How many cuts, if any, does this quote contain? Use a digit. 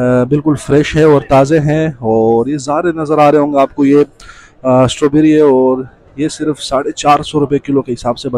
0